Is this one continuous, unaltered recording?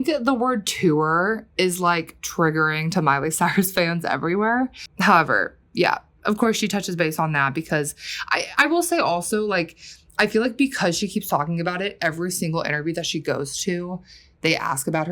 yes; 0 cuts

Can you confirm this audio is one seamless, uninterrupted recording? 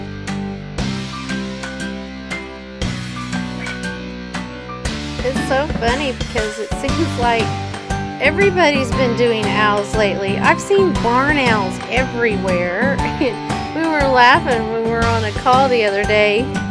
no; 1 cut; at 14.0 s

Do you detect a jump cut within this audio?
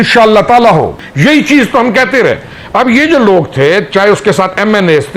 yes; 1 cut; at 1.0 s

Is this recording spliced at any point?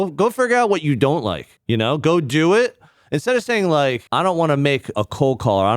yes; 3 cuts; at 1.5 s, 4.0 s, 4.9 s

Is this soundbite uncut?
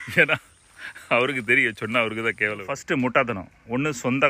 no; 1 cut; at 2.7 s

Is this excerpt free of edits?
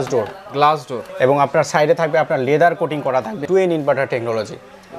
no; 2 cuts; at 1.0 s, 3.4 s

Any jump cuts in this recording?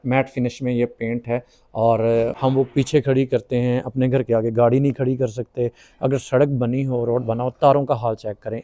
yes; 1 cut; at 2.3 s

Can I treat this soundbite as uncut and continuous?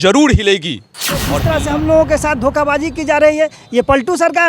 no; 1 cut; at 1.4 s

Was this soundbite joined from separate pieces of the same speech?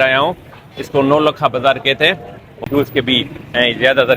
yes; 1 cut; at 2.6 s

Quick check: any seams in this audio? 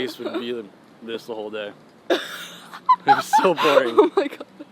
no; 0 cuts

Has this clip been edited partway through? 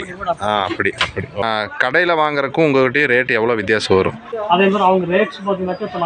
yes; 2 cuts; at 1.4 s, 4.3 s

